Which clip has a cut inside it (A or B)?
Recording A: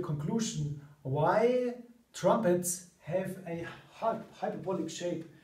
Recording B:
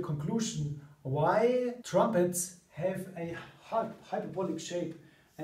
B